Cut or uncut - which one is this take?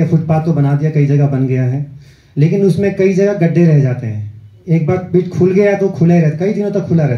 uncut